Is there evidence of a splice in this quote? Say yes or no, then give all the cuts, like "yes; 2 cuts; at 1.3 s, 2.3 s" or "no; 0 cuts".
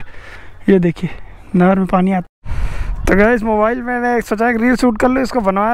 yes; 1 cut; at 2.2 s